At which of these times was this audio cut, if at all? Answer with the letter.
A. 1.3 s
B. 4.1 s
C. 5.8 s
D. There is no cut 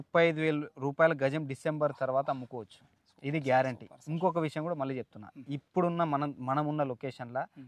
D